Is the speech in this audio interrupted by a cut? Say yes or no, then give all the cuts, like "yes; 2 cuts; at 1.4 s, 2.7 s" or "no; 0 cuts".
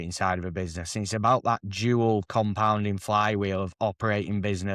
no; 0 cuts